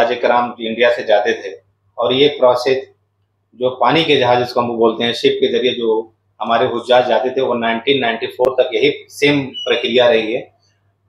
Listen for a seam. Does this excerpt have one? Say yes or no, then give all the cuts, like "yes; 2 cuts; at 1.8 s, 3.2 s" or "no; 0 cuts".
no; 0 cuts